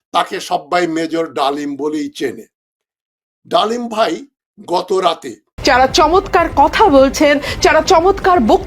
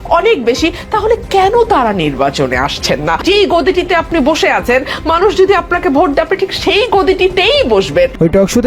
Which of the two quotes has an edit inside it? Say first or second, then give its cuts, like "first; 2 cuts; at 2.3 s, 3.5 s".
first; 1 cut; at 5.5 s